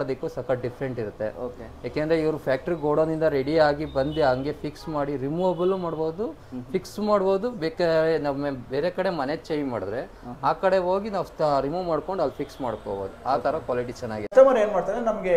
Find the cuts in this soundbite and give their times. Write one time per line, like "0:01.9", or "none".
0:14.3